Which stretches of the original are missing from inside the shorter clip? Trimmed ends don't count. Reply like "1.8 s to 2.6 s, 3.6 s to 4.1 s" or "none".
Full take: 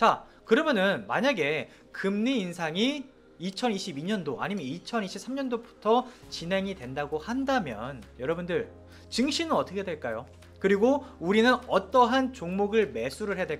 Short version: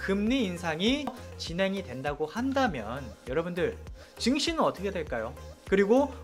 3.3 s to 6.2 s